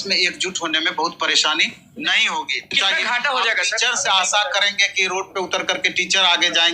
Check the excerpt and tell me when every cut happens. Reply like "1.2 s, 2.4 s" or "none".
2.7 s